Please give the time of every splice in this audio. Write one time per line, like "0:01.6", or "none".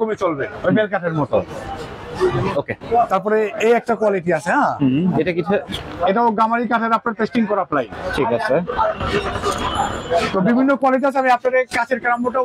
none

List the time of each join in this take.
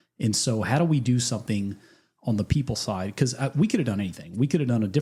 none

